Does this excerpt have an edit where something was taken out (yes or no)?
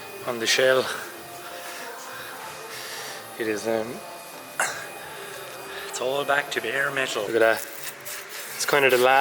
yes